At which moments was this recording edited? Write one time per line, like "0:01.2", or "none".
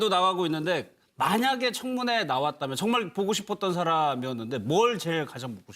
0:01.8